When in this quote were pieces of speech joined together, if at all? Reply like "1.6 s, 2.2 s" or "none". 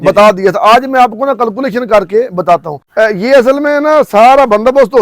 2.8 s